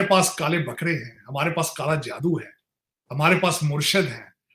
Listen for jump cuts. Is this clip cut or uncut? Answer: uncut